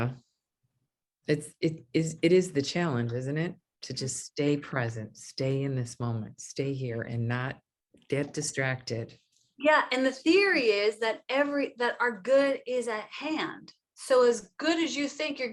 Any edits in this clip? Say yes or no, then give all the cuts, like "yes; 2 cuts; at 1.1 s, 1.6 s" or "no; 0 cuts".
no; 0 cuts